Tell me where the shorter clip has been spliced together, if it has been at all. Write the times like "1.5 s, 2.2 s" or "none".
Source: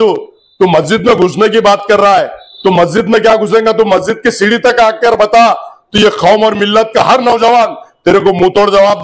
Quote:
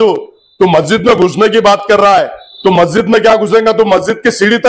none